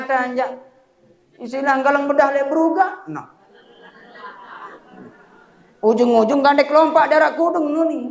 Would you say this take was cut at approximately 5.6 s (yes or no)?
no